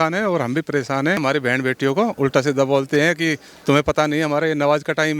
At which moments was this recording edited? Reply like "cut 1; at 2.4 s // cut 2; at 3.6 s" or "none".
cut 1; at 1.2 s